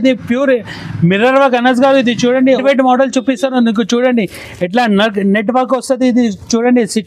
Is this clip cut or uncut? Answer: cut